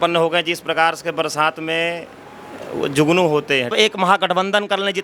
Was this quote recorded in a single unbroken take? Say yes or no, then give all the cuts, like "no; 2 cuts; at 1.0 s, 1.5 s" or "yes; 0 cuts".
no; 1 cut; at 3.7 s